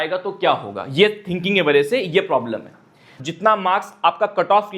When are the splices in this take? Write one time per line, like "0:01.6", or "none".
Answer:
0:03.1